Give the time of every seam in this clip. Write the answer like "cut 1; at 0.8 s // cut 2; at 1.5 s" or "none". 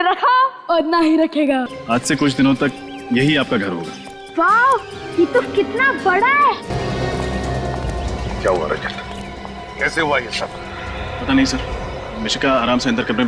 cut 1; at 1.8 s // cut 2; at 6.7 s